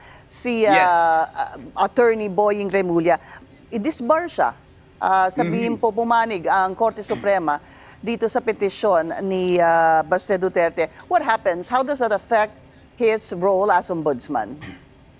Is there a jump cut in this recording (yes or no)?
yes